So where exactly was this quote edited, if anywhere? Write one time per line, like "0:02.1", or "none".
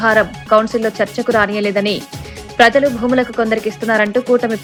none